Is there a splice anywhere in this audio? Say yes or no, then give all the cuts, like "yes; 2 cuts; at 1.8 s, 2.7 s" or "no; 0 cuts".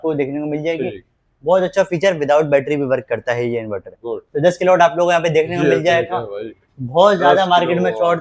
yes; 1 cut; at 4.2 s